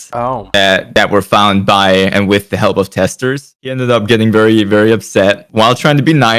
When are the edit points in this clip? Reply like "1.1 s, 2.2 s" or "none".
3.7 s